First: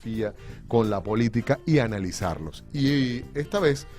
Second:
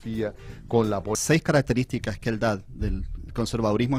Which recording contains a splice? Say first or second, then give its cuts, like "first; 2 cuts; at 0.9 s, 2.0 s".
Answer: first; 1 cut; at 1.2 s